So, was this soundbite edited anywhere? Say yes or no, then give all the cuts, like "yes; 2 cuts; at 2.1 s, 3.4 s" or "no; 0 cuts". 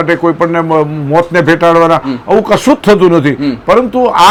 no; 0 cuts